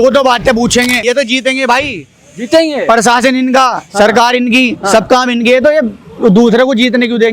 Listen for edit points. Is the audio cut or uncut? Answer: cut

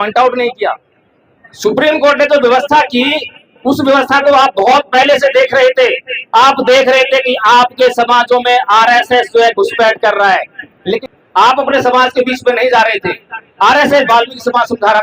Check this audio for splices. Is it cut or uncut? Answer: cut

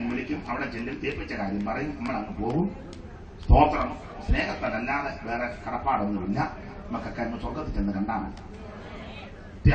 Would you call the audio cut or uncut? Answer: uncut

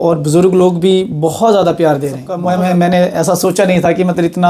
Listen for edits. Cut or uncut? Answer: cut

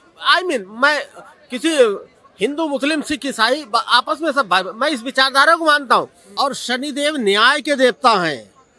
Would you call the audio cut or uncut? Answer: cut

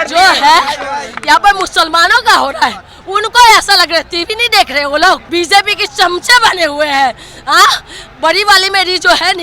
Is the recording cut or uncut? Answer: cut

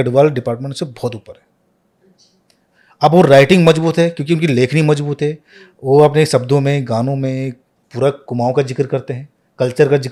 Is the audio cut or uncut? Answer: uncut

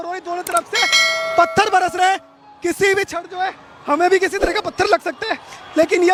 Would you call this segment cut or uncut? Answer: uncut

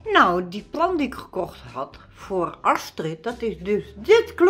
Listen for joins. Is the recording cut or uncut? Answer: uncut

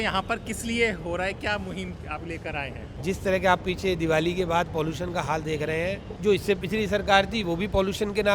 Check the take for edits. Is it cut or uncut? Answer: cut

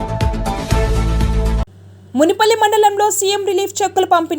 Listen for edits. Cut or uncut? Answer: uncut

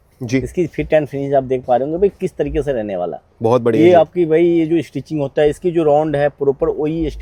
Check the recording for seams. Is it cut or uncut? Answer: uncut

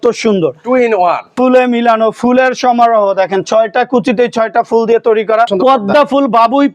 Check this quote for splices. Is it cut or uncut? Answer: cut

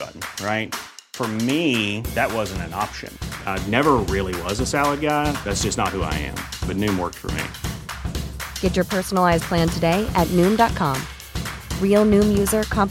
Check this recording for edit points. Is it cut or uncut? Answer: uncut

